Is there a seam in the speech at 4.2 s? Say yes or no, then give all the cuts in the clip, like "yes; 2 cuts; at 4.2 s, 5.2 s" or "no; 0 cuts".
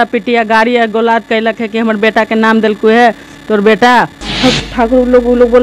yes; 1 cut; at 4.2 s